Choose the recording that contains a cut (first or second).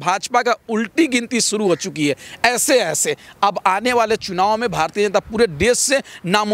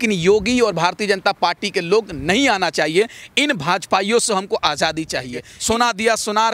second